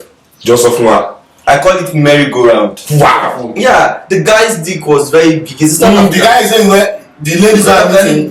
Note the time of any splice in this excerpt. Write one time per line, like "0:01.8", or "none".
0:03.4